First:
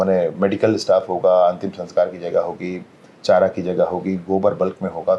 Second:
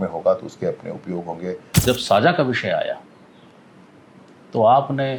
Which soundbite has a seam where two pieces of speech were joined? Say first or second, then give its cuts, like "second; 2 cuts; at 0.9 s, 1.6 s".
second; 1 cut; at 1.8 s